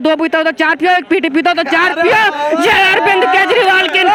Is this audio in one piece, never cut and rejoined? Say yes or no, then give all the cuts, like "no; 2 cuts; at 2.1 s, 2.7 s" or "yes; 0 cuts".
yes; 0 cuts